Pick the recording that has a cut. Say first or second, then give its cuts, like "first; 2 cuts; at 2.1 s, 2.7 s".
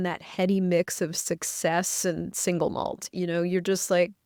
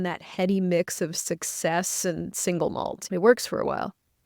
second; 1 cut; at 3.0 s